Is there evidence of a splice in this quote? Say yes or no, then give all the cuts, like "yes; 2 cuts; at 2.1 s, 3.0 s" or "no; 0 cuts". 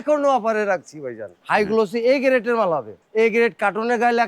yes; 2 cuts; at 1.4 s, 3.0 s